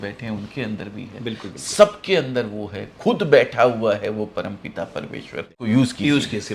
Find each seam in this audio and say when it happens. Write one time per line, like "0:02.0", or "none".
0:05.7